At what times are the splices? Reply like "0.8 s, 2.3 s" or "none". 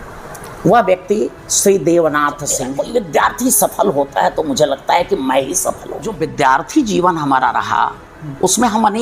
2.7 s, 6.2 s